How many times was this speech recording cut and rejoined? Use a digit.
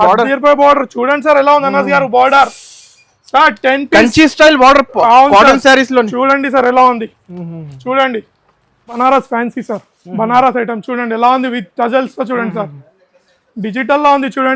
1